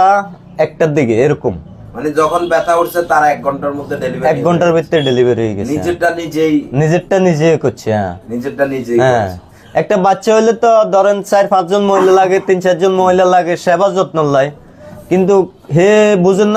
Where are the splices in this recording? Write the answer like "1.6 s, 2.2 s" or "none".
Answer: none